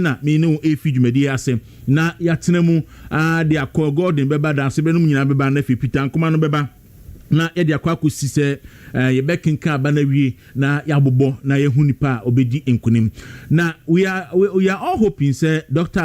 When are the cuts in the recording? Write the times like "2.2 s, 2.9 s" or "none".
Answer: 5.2 s